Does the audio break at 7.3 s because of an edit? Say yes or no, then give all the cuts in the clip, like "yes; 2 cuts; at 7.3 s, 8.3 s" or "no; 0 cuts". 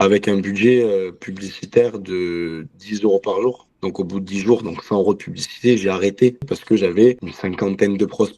yes; 2 cuts; at 6.6 s, 7.3 s